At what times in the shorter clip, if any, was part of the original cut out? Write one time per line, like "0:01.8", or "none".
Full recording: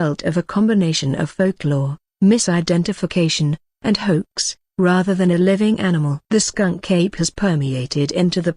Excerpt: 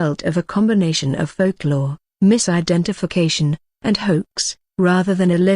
none